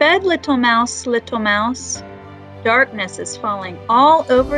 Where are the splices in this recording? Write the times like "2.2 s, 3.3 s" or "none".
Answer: none